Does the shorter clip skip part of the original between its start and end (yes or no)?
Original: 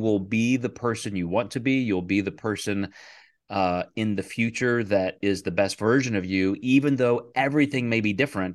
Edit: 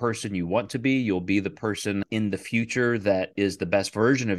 yes